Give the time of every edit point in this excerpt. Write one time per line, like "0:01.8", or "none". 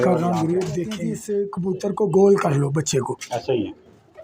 0:01.1